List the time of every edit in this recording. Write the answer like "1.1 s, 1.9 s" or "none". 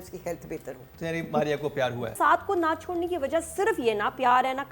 2.1 s